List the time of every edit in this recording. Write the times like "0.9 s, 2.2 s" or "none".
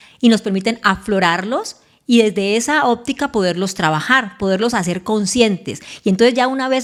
none